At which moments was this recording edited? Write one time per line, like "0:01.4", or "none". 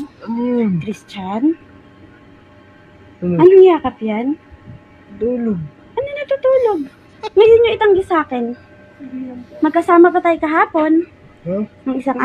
0:10.5